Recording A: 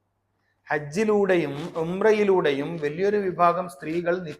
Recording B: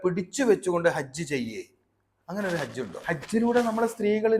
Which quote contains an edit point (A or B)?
B